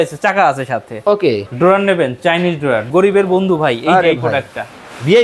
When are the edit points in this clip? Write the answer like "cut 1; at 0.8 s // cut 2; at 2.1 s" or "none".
cut 1; at 1.4 s // cut 2; at 2.9 s